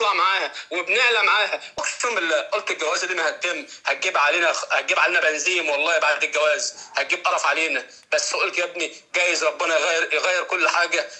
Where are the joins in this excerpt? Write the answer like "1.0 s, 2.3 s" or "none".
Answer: 1.8 s

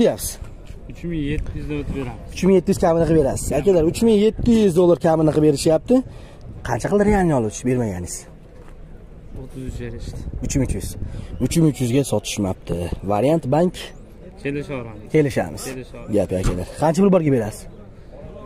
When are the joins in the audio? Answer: none

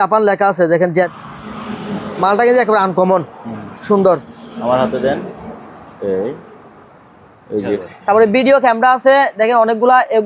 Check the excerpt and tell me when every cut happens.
1.1 s, 7.8 s

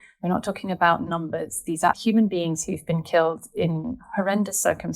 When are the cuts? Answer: 2.0 s

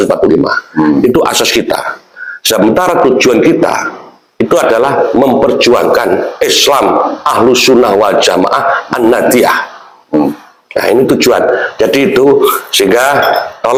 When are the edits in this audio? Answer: none

